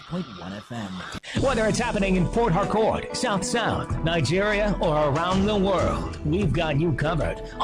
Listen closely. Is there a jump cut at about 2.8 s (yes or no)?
no